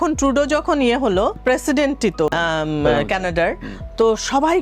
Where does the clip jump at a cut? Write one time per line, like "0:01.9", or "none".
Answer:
0:01.4
0:02.3